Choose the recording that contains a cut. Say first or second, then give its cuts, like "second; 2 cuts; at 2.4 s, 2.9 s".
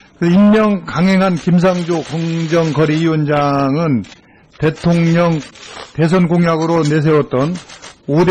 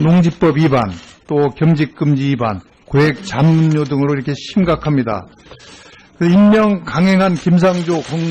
second; 1 cut; at 3.2 s